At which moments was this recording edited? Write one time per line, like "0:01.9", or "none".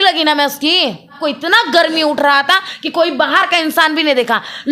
0:01.2